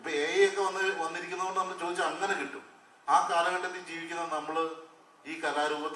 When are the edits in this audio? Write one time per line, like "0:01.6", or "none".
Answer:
none